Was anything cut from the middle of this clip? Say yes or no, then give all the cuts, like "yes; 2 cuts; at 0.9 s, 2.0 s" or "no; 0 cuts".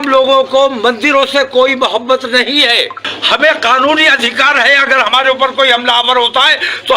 yes; 1 cut; at 3.1 s